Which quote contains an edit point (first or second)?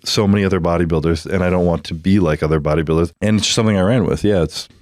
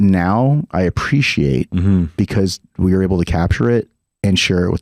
first